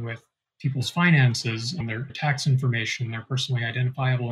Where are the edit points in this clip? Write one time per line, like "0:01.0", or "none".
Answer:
0:02.1